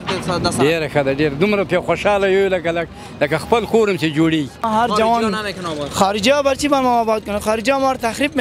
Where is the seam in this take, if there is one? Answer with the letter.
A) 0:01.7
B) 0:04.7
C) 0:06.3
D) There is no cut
B